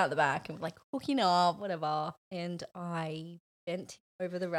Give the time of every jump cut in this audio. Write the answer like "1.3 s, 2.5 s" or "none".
2.2 s